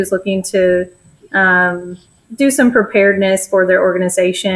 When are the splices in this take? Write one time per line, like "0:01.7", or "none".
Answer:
none